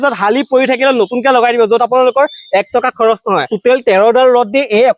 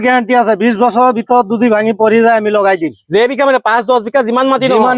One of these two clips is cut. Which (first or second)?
first